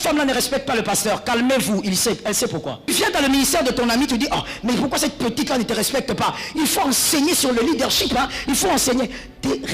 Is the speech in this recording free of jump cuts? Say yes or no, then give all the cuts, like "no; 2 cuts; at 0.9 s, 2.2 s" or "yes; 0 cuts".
no; 1 cut; at 2.9 s